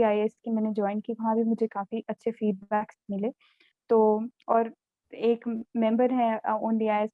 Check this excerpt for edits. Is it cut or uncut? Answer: uncut